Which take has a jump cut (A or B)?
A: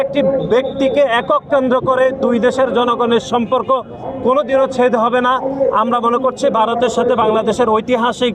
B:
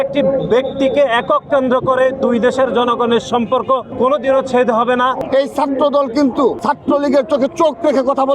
B